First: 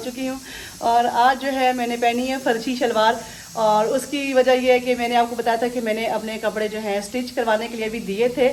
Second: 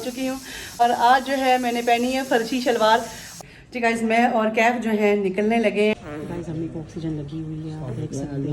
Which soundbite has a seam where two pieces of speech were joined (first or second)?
second